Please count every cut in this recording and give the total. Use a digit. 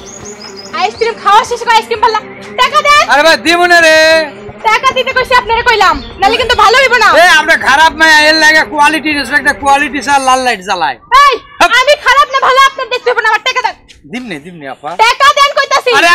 0